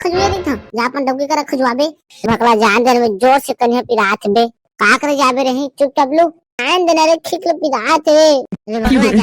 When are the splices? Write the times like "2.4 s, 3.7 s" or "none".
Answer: 2.2 s, 6.6 s

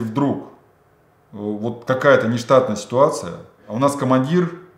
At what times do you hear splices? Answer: 3.6 s

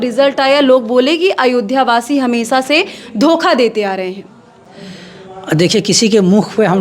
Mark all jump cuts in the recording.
none

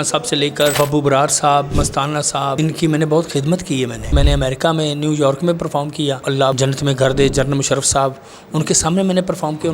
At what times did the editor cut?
0.7 s, 2.5 s, 4.1 s, 6.4 s

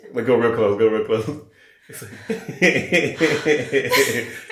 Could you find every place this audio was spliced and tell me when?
none

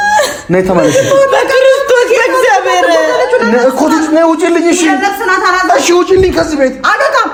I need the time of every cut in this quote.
none

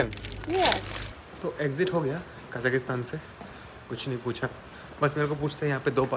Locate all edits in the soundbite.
1.1 s

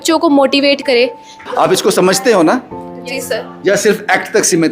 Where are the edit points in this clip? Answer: 1.4 s

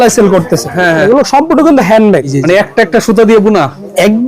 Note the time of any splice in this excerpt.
1.0 s, 2.3 s

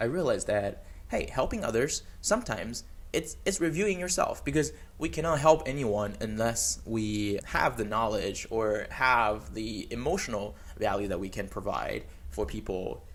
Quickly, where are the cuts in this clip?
none

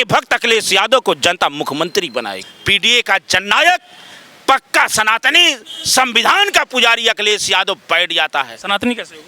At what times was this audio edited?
2.4 s

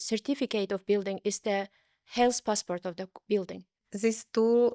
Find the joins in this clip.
3.8 s

